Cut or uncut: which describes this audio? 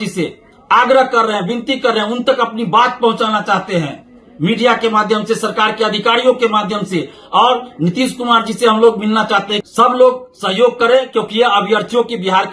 cut